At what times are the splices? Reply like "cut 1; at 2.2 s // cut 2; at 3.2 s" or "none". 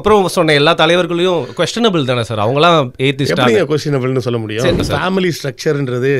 cut 1; at 4.8 s